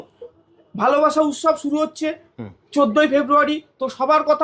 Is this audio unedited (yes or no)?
yes